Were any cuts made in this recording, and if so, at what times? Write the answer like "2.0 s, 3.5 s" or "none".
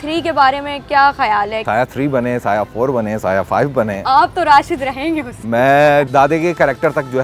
1.6 s, 6.1 s